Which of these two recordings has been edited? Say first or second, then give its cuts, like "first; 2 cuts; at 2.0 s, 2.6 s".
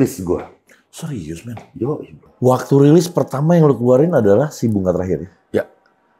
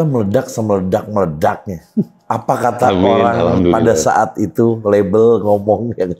first; 1 cut; at 2.2 s